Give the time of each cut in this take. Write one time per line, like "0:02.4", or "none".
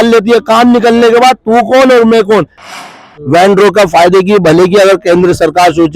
0:02.8